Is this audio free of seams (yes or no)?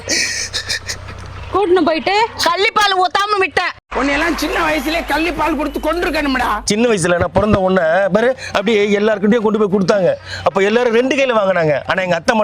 no